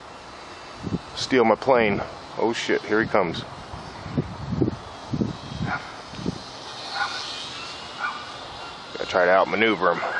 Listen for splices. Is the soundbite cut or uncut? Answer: uncut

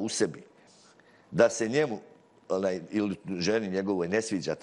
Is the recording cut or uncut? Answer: uncut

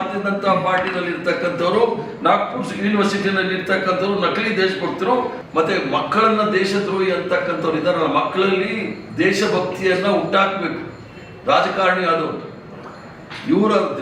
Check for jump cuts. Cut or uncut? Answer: cut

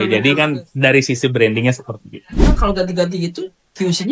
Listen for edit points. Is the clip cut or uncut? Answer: cut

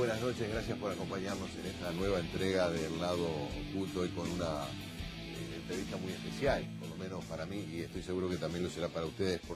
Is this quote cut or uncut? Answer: uncut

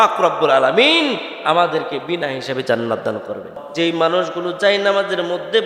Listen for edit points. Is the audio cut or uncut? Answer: cut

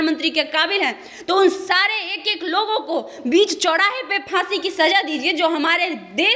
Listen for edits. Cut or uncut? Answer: uncut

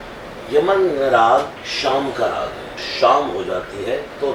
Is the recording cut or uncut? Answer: cut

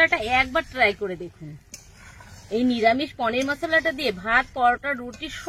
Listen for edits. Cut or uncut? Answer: uncut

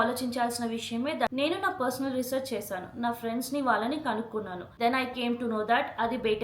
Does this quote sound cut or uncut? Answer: cut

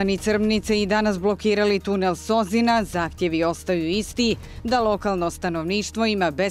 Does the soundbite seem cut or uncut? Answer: uncut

